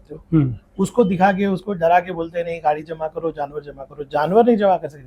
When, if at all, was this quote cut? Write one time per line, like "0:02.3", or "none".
none